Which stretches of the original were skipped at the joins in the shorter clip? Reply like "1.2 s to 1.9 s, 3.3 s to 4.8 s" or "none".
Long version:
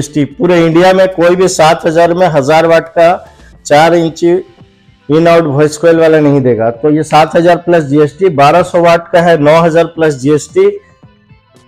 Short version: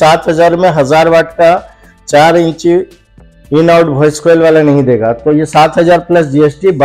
none